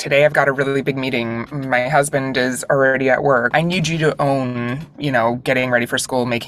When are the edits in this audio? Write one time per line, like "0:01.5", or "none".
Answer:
0:03.5